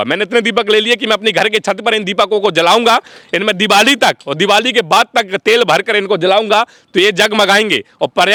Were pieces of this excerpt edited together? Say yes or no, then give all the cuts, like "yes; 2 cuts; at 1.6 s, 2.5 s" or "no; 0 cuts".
no; 0 cuts